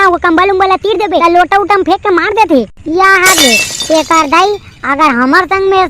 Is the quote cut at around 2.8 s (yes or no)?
no